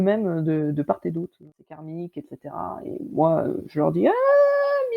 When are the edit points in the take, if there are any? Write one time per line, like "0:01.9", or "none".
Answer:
0:01.5